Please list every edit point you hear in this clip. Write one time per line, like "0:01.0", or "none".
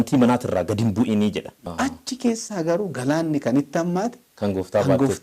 0:01.6